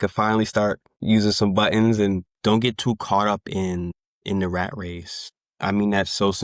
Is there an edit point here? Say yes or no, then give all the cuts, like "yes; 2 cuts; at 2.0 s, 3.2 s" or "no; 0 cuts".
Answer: yes; 1 cut; at 2.3 s